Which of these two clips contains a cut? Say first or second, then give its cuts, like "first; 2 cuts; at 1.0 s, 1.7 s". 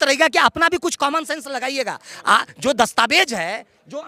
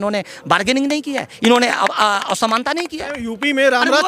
second; 1 cut; at 3.1 s